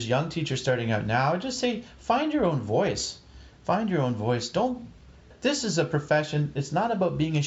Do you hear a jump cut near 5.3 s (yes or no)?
yes